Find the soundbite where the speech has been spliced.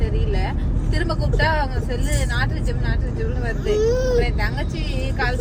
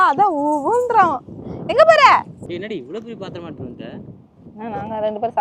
second; 1 cut; at 2.4 s

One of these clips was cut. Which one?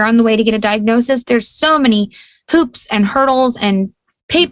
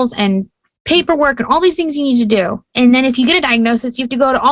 second; 1 cut; at 2.6 s

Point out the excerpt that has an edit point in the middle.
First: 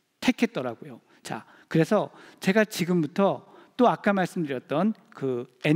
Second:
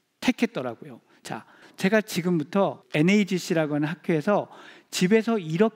second; 2 cuts; at 1.6 s, 2.8 s

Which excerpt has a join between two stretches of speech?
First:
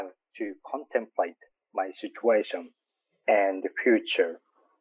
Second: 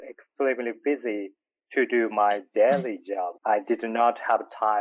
second; 1 cut; at 3.3 s

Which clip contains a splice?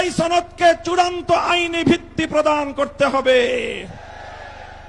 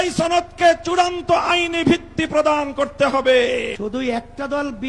second; 1 cut; at 3.8 s

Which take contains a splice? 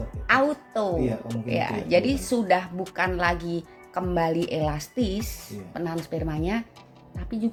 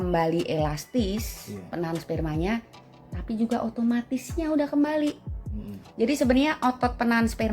second; 1 cut; at 5.6 s

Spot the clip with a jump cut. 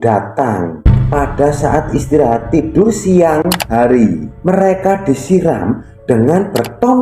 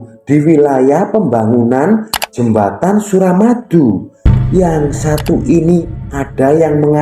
second; 1 cut; at 2.2 s

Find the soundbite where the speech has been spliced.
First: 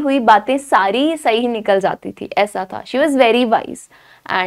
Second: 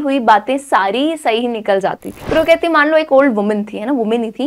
second; 1 cut; at 2.2 s

